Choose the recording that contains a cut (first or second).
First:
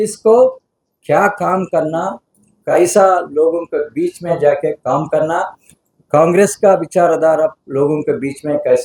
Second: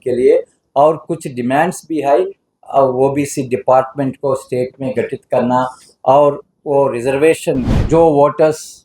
second